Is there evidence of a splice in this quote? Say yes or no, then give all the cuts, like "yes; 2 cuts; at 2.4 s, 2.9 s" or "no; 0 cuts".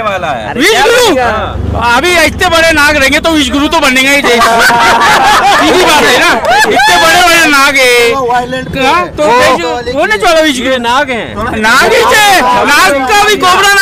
no; 0 cuts